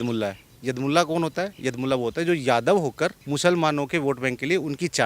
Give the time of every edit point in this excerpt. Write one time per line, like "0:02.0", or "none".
0:03.2